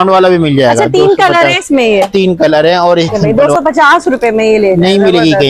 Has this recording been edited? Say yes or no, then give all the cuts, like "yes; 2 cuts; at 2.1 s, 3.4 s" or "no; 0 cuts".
yes; 1 cut; at 3.2 s